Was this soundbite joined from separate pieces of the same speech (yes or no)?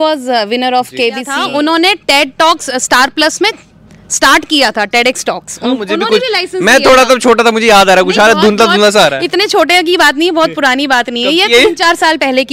yes